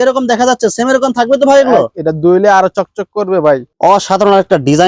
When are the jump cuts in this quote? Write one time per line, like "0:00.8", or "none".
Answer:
0:03.7